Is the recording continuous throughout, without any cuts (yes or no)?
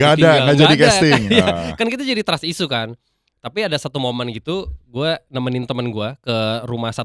yes